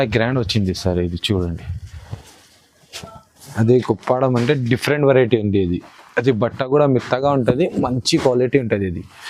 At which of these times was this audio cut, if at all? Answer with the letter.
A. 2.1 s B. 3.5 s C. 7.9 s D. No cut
B